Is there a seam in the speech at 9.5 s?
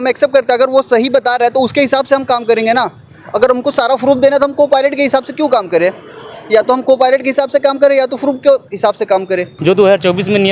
yes; 1 cut; at 9.5 s

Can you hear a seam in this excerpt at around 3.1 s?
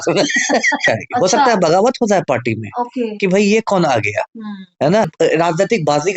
no; 2 cuts; at 0.9 s, 5.1 s

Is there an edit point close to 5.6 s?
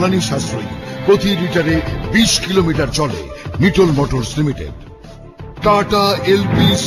yes; 1 cut; at 5.6 s

